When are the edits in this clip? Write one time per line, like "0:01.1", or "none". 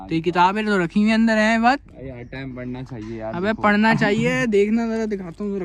none